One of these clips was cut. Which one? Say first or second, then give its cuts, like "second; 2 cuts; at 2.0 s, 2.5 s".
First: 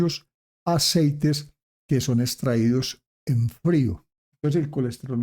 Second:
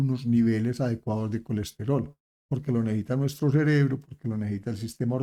first; 1 cut; at 4.1 s